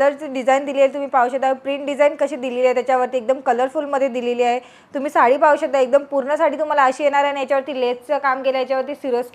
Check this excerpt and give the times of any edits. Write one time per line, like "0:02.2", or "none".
none